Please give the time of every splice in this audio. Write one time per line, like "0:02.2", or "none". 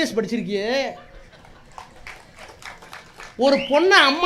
none